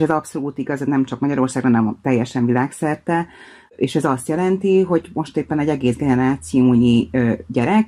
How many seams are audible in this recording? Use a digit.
1